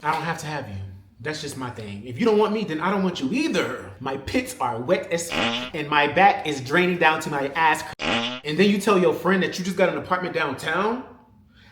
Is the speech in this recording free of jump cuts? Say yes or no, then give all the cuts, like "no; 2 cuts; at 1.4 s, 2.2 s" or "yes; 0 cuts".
no; 3 cuts; at 3.9 s, 5.4 s, 8.3 s